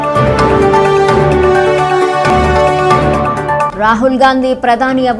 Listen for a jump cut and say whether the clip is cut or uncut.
cut